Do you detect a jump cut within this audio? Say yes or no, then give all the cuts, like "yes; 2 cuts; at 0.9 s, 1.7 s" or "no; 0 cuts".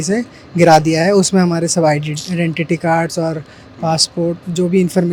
no; 0 cuts